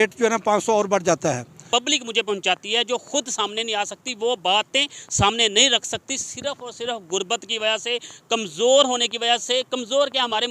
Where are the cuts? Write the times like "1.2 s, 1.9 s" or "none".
1.6 s